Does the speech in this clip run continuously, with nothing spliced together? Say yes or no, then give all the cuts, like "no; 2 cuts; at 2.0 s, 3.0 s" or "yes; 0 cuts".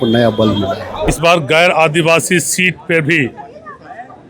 no; 1 cut; at 1.1 s